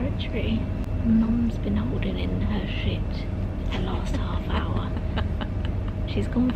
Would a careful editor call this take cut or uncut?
uncut